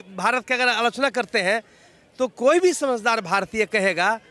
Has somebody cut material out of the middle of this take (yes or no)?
no